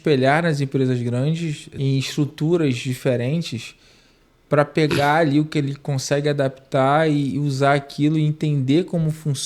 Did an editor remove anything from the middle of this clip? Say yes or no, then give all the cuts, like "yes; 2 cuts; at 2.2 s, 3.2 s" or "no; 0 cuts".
yes; 1 cut; at 1.6 s